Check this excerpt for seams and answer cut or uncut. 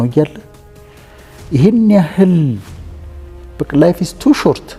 uncut